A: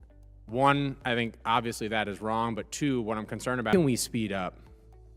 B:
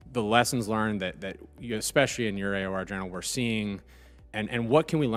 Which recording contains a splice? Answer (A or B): A